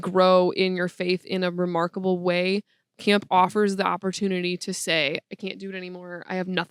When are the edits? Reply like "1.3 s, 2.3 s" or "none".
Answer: none